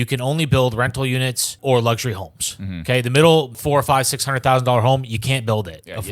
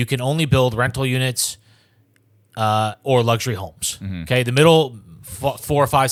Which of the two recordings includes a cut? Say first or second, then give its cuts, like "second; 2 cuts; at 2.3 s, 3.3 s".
first; 2 cuts; at 1.5 s, 3.6 s